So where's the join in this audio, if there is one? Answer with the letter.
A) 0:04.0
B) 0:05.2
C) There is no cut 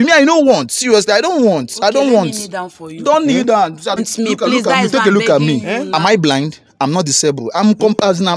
A